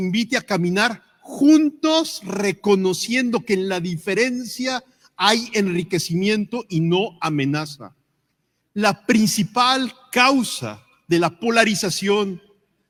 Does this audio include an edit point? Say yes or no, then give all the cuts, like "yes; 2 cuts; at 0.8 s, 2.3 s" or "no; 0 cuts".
no; 0 cuts